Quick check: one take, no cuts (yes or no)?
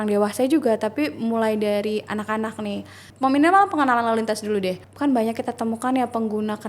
no